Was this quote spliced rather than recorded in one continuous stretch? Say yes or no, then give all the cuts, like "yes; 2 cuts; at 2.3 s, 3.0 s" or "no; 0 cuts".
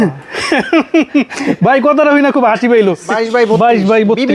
yes; 1 cut; at 3.1 s